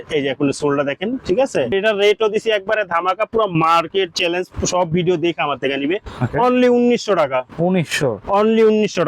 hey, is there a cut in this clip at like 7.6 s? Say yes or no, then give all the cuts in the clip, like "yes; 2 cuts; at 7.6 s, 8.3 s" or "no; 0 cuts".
no; 1 cut; at 1.7 s